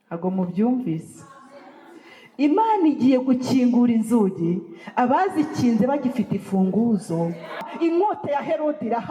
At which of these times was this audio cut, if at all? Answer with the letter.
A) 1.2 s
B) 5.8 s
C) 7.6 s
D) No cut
C